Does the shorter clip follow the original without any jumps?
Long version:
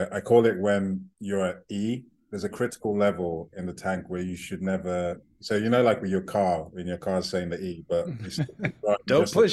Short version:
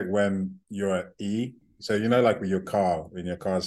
no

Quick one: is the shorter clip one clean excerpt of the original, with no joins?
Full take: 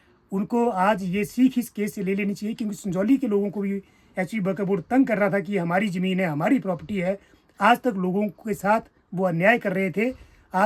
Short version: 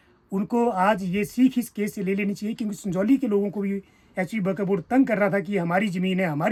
yes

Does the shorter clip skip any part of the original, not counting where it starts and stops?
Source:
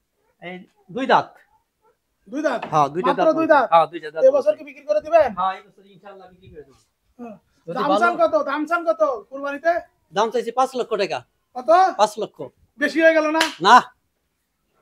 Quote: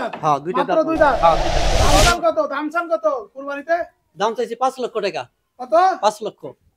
yes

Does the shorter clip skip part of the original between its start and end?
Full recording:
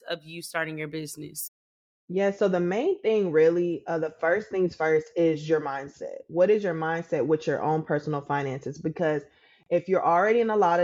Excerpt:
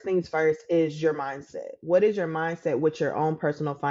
no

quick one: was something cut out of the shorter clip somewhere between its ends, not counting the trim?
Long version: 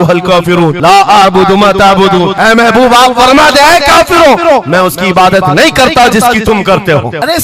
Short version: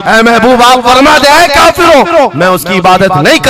no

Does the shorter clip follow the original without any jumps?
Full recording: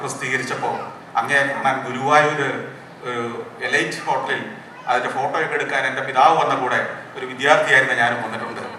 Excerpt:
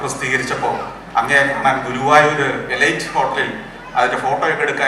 no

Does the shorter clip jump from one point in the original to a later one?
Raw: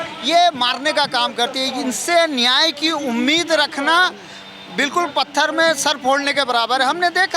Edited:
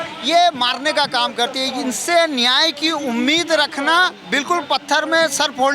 yes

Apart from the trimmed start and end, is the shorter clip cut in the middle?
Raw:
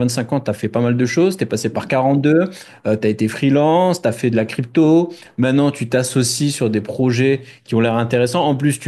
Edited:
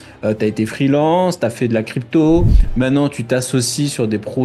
no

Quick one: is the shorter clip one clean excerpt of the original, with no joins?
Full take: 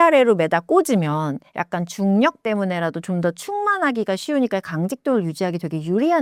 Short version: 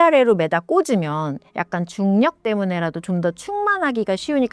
yes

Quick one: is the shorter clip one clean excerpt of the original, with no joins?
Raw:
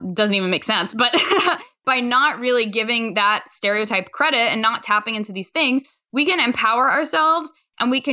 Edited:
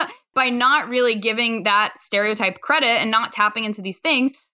yes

